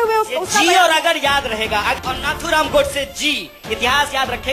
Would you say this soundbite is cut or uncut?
cut